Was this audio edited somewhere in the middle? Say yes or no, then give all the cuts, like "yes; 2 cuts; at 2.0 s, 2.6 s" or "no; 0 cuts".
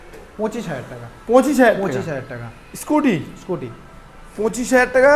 no; 0 cuts